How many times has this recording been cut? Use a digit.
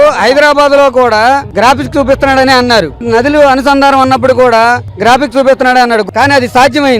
2